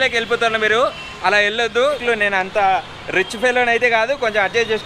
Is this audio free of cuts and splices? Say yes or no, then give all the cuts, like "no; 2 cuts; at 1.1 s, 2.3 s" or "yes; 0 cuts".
no; 1 cut; at 2.0 s